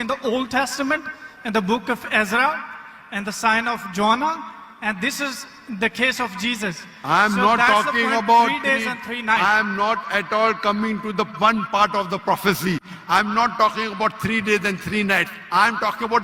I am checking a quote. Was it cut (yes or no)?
no